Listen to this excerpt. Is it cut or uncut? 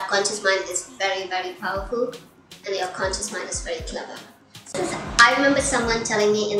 cut